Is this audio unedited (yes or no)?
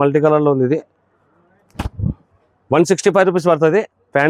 yes